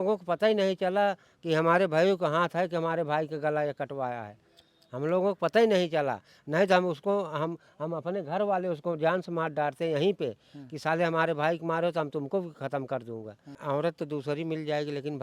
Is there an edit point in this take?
yes; 1 cut; at 13.6 s

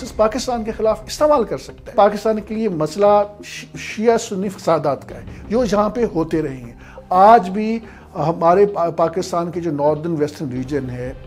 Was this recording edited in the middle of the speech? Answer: yes; 1 cut; at 1.9 s

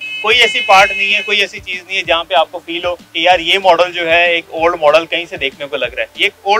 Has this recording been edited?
yes; 1 cut; at 3.1 s

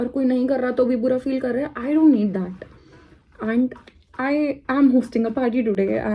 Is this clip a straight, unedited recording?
yes; 0 cuts

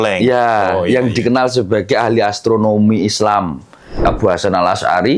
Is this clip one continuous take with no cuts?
no; 1 cut; at 4.0 s

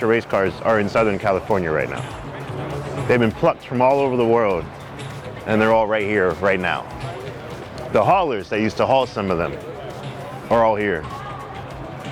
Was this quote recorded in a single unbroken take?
yes; 0 cuts

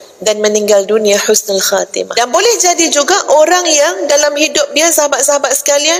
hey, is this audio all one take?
no; 1 cut; at 2.1 s

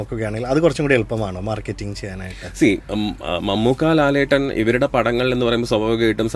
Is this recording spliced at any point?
no; 0 cuts

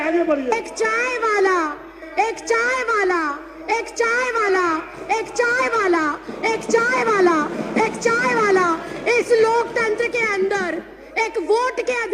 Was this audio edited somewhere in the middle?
no; 0 cuts

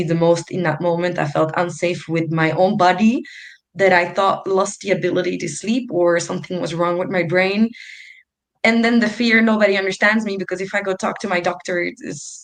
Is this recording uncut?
yes; 0 cuts

